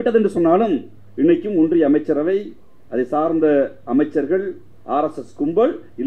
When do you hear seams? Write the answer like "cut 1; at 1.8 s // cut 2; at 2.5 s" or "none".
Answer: none